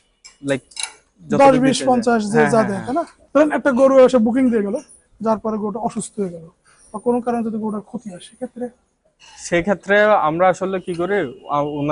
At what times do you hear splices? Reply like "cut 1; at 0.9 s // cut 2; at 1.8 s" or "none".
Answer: cut 1; at 3.2 s